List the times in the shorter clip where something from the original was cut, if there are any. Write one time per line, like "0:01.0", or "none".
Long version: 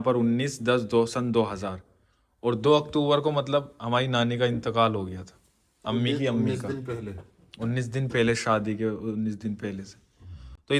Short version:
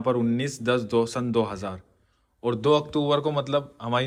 none